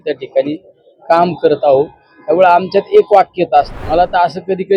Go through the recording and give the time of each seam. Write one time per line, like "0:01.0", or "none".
0:03.8